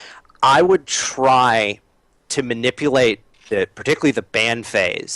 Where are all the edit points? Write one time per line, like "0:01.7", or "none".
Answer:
0:03.8